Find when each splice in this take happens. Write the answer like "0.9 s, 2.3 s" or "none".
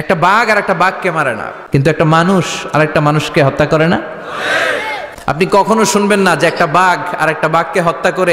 1.5 s, 5.1 s